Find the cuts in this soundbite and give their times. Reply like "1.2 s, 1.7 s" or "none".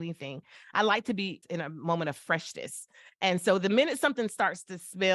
1.4 s